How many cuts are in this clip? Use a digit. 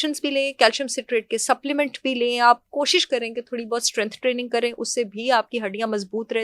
0